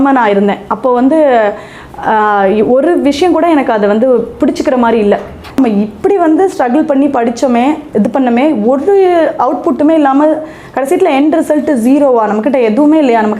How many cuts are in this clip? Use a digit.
1